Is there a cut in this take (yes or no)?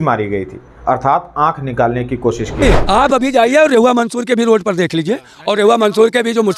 yes